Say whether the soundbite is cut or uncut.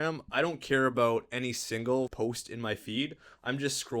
cut